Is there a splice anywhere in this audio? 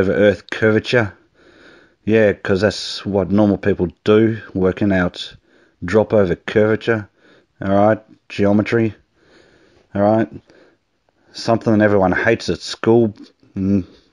yes; 1 cut; at 10.7 s

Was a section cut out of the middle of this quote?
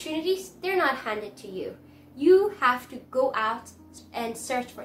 yes; 1 cut; at 4.0 s

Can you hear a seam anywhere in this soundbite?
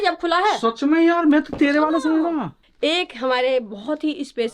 yes; 1 cut; at 2.6 s

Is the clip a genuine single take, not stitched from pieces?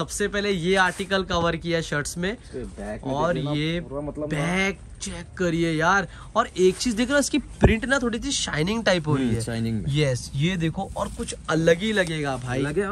yes; 0 cuts

